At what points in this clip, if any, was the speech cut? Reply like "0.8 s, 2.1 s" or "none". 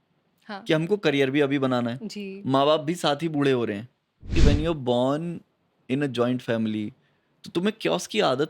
4.3 s